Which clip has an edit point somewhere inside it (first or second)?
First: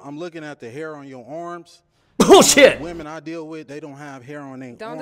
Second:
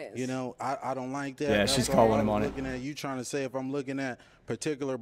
first